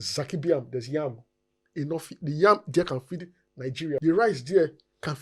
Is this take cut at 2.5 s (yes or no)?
no